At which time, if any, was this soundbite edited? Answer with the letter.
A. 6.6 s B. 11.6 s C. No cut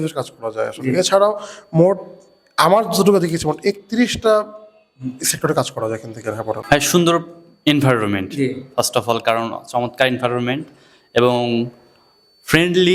A